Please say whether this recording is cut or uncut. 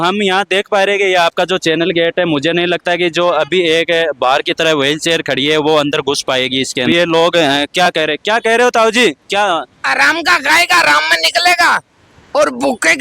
cut